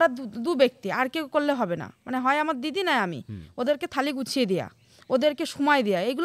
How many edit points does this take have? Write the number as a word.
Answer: zero